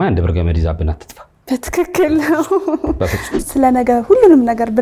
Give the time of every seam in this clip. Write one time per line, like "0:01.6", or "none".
0:03.5